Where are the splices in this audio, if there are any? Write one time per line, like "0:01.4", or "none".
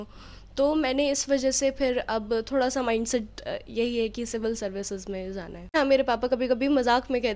0:05.7

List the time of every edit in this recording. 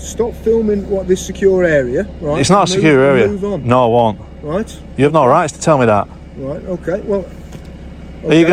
none

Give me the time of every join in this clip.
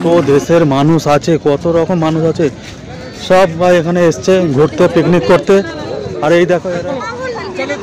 0:06.8

